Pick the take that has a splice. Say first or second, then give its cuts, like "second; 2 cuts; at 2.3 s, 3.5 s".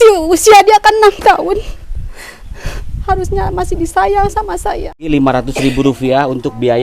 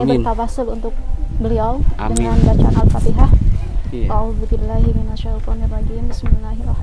first; 1 cut; at 5.1 s